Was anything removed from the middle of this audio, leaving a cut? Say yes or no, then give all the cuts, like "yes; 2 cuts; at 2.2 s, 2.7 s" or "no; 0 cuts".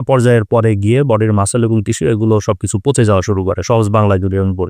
no; 0 cuts